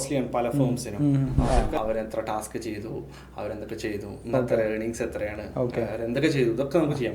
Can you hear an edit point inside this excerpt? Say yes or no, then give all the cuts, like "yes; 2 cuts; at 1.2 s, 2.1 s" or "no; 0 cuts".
yes; 1 cut; at 1.5 s